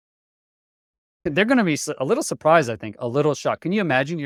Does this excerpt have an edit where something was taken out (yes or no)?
no